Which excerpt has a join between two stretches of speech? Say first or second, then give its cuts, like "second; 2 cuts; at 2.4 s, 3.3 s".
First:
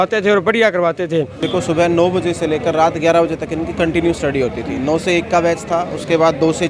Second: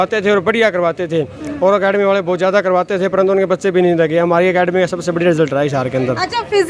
first; 1 cut; at 1.4 s